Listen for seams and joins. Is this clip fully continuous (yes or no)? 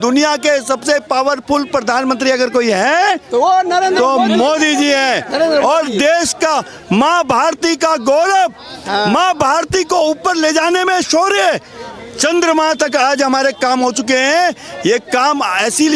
yes